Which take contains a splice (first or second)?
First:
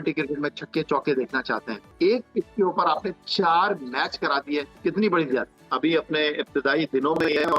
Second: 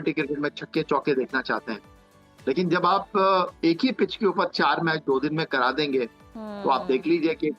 first